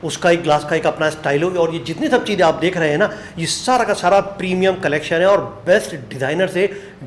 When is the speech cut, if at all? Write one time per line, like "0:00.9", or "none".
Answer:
none